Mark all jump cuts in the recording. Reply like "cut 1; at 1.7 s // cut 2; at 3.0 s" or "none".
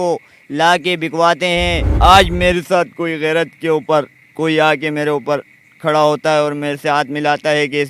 cut 1; at 1.9 s